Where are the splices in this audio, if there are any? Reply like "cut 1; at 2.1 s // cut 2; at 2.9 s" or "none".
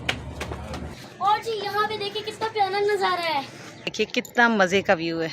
cut 1; at 1.0 s // cut 2; at 3.9 s